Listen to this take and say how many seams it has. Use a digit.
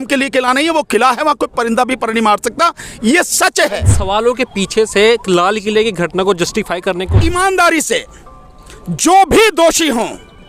2